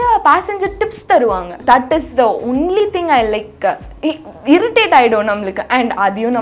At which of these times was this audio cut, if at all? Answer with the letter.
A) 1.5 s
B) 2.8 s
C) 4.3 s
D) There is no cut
A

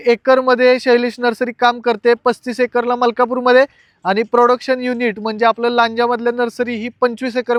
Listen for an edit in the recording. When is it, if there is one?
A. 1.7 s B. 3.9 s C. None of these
C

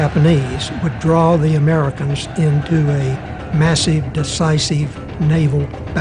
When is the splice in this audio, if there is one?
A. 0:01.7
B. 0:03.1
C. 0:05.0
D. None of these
D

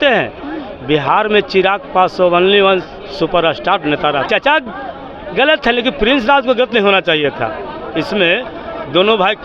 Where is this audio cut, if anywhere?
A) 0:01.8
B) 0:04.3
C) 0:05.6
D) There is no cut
B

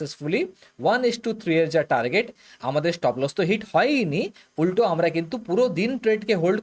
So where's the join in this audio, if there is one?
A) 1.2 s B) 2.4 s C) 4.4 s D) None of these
B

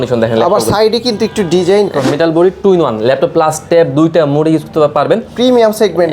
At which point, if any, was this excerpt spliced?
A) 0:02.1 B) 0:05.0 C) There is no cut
A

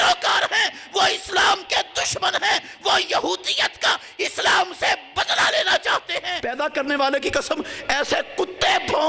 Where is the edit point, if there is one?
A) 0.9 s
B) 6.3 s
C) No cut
B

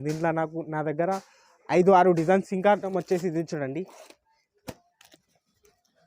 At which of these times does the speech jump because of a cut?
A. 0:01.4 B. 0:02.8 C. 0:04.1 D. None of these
B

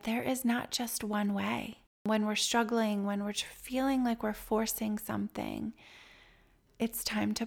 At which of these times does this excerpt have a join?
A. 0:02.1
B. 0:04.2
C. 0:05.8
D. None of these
A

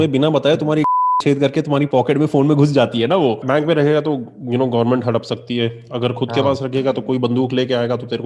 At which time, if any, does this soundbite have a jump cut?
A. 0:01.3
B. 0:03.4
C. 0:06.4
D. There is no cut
B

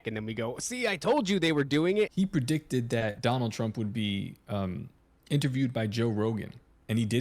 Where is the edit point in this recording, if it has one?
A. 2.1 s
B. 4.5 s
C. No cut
A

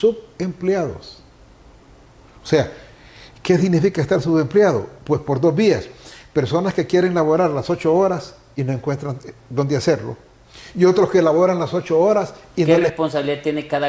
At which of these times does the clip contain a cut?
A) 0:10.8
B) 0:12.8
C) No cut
B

